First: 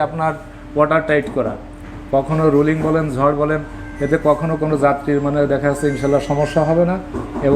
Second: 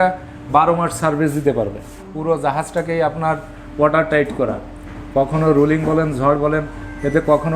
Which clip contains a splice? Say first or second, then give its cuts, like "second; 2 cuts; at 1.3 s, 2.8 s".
second; 1 cut; at 2.1 s